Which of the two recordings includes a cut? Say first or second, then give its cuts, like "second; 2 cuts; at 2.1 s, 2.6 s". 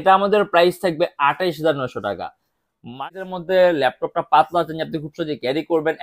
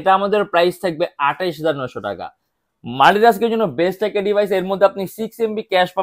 first; 1 cut; at 3.0 s